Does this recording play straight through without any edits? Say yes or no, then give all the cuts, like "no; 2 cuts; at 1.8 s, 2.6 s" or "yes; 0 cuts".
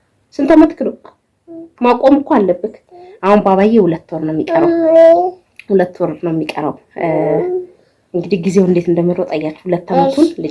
yes; 0 cuts